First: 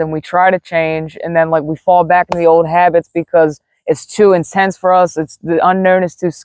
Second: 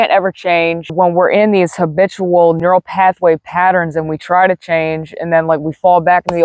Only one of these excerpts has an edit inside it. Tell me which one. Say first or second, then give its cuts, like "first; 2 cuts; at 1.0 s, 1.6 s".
second; 2 cuts; at 0.9 s, 2.6 s